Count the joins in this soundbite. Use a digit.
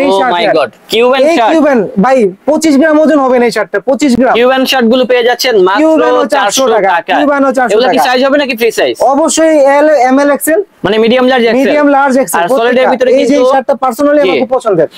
0